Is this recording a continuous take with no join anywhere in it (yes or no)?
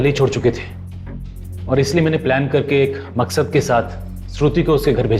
yes